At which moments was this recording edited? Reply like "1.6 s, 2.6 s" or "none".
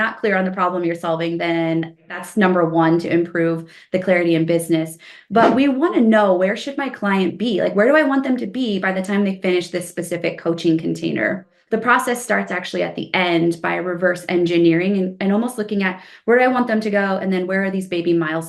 2.1 s, 11.6 s